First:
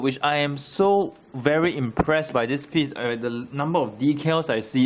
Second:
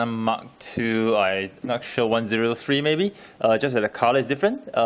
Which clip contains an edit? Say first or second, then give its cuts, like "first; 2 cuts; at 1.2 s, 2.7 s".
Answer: second; 1 cut; at 2.3 s